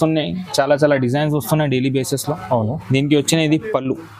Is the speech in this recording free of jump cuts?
yes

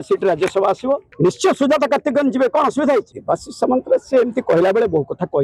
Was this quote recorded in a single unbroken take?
no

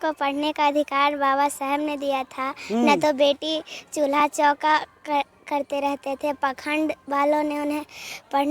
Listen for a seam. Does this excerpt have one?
no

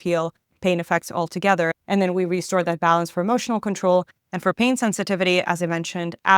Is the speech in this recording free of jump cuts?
no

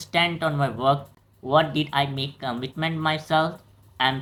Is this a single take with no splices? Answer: yes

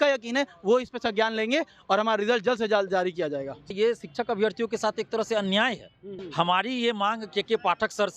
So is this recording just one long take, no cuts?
no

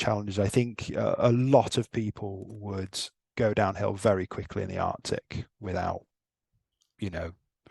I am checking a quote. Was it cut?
no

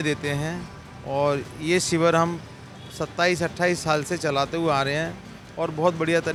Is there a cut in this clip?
no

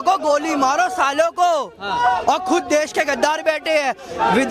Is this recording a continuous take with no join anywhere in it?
yes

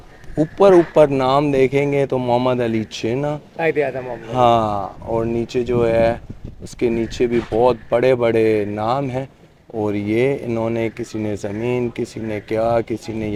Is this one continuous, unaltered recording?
yes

